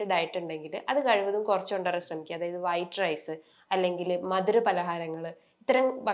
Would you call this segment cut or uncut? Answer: uncut